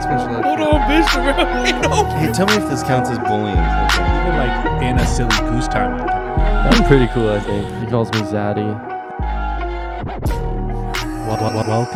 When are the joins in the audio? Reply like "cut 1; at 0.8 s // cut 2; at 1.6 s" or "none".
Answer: none